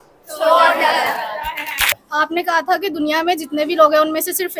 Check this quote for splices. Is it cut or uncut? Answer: cut